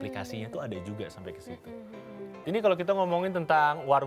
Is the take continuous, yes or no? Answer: no